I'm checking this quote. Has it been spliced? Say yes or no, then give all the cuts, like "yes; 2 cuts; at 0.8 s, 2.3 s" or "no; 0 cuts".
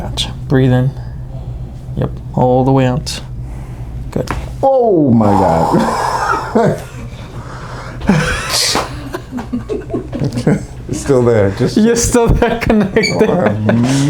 no; 0 cuts